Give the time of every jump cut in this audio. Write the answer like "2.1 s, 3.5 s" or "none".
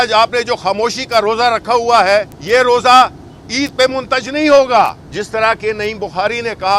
2.4 s, 5.0 s